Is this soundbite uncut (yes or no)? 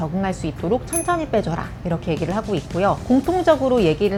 yes